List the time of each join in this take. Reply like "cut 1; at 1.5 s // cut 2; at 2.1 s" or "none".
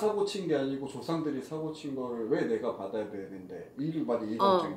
none